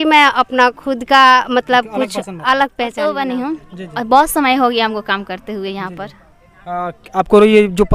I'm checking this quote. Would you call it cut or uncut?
cut